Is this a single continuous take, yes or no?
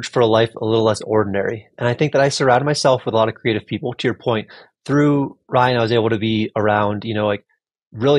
yes